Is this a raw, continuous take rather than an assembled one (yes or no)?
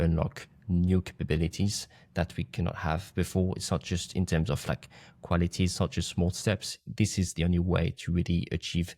yes